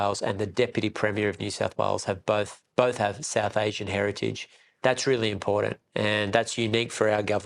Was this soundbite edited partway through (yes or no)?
no